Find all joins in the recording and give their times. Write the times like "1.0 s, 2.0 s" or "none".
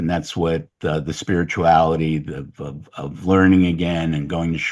none

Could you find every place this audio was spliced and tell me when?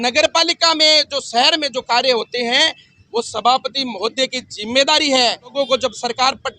5.5 s

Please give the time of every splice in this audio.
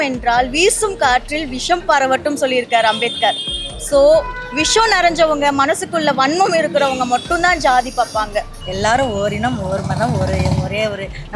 8.6 s

